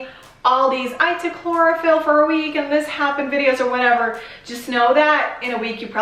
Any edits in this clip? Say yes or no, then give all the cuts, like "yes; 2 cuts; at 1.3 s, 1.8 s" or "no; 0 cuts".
no; 0 cuts